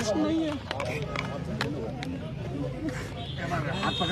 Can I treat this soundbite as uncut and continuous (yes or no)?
yes